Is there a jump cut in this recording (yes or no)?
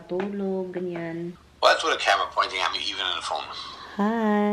yes